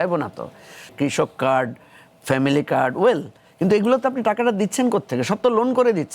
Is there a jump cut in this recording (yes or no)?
yes